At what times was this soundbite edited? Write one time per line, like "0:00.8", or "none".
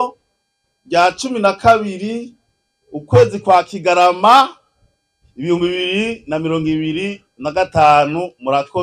none